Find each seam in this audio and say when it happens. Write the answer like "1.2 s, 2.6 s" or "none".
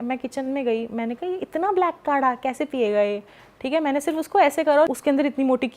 4.9 s